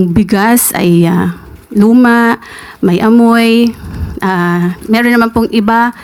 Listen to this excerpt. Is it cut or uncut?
uncut